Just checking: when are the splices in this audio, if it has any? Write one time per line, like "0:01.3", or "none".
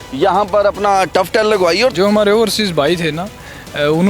0:01.9